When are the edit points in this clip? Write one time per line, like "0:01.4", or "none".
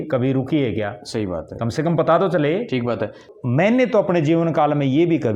0:03.2